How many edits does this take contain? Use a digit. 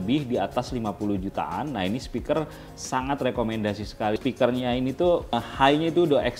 2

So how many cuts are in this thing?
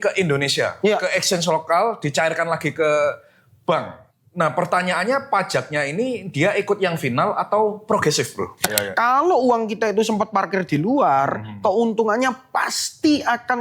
2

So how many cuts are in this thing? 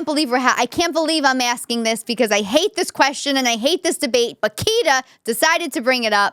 0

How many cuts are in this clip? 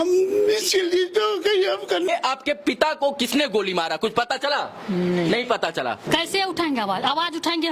2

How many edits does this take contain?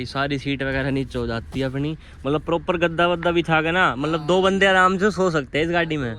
0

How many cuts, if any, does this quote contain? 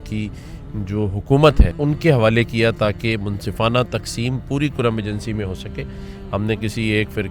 1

